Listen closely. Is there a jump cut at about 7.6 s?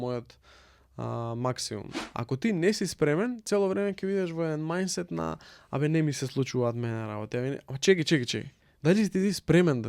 no; 1 cut; at 2.0 s

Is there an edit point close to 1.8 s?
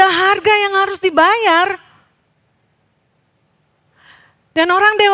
no; 0 cuts

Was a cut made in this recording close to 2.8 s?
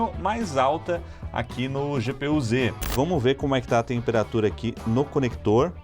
yes; 1 cut; at 2.8 s

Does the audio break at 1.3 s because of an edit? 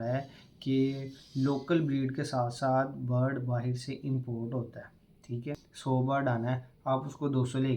no; 1 cut; at 5.7 s

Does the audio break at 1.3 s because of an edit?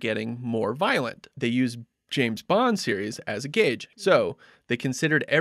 yes; 2 cuts; at 1.3 s, 3.9 s

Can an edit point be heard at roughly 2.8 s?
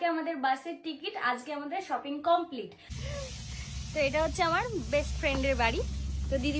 yes; 1 cut; at 2.8 s

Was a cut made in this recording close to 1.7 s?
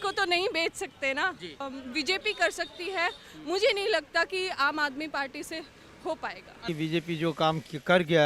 yes; 2 cuts; at 1.7 s, 6.6 s

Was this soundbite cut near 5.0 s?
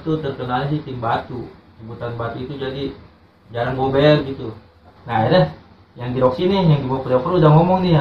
yes; 1 cut; at 5.0 s

